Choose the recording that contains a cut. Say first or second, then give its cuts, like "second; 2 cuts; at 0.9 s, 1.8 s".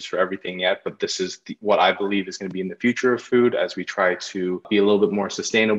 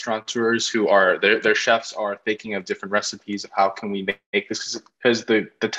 first; 1 cut; at 4.6 s